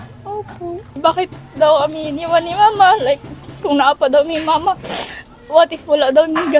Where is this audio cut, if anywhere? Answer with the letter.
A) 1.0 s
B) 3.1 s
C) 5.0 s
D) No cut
A